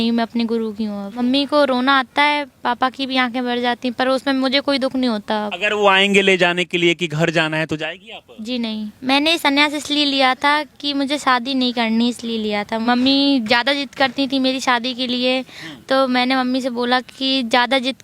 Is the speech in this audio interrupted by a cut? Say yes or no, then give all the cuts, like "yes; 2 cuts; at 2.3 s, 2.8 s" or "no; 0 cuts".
yes; 4 cuts; at 1.2 s, 5.5 s, 8.9 s, 12.8 s